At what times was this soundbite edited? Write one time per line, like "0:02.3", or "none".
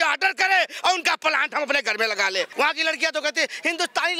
0:02.5